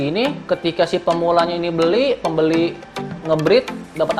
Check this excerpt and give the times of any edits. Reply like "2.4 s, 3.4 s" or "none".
none